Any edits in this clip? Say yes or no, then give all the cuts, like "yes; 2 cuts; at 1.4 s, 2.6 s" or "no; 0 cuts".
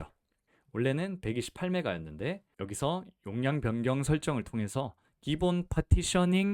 yes; 1 cut; at 2.5 s